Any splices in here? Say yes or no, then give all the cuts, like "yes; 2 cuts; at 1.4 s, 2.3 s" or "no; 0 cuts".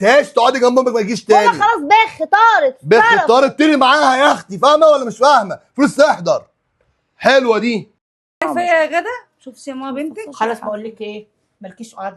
yes; 1 cut; at 8.0 s